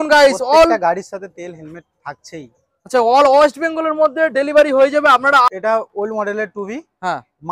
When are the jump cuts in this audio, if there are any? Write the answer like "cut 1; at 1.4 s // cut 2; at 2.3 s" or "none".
cut 1; at 5.5 s